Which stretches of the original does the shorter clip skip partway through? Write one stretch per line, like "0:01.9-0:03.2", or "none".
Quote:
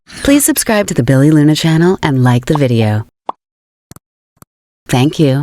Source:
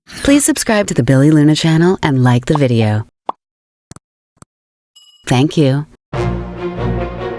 0:04.2-0:04.6